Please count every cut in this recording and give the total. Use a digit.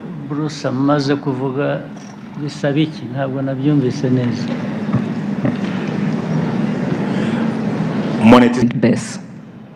1